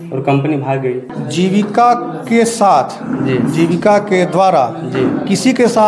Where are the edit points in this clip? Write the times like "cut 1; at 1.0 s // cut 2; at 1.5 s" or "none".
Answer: cut 1; at 1.1 s